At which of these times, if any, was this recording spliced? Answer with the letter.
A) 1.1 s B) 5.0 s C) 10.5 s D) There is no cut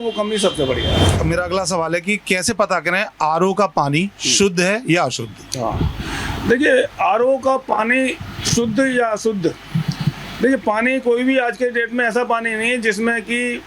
A